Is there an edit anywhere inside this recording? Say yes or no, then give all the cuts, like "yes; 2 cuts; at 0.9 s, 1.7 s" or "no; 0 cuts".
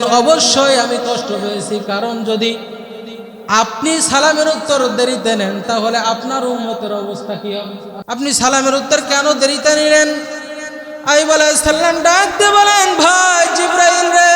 yes; 1 cut; at 7.9 s